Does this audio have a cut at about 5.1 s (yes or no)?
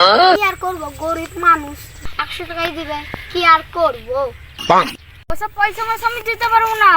yes